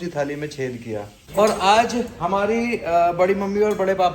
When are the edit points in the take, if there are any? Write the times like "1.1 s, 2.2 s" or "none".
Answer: 1.2 s